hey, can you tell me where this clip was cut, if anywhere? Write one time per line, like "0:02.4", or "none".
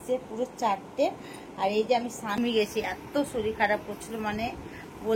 0:02.3